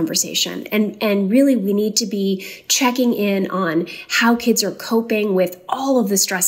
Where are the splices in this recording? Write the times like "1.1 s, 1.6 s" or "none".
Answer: none